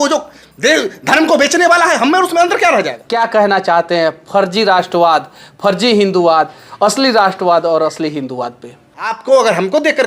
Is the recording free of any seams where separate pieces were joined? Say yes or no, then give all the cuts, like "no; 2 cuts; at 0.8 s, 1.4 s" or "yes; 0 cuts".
no; 2 cuts; at 3.0 s, 9.2 s